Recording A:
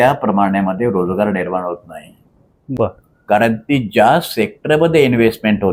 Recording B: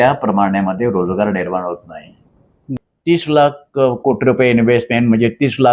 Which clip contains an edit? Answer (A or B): B